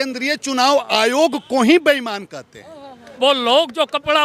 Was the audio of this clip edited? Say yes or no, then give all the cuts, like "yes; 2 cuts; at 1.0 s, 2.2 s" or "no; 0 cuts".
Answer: yes; 1 cut; at 3.0 s